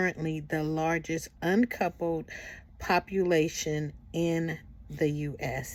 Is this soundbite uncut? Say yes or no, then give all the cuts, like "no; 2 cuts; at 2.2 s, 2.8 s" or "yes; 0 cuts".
yes; 0 cuts